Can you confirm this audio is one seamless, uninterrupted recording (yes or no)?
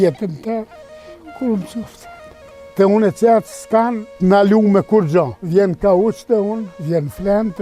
no